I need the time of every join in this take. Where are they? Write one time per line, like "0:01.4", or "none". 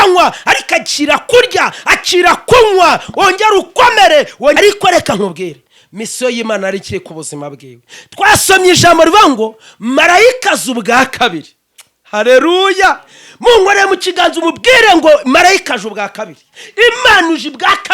0:04.6